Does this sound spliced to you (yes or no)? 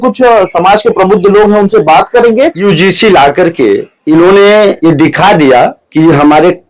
yes